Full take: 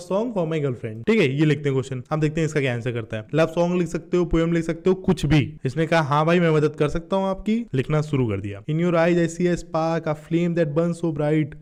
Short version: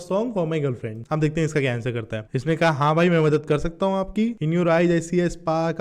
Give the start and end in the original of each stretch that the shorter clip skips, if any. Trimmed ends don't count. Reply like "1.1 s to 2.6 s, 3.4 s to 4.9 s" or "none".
0.9 s to 1.9 s, 3.2 s to 5.5 s, 7.7 s to 8.6 s